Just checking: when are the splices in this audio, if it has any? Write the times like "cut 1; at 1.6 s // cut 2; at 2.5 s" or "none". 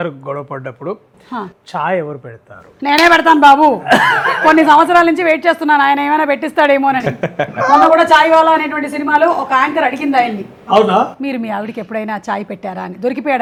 none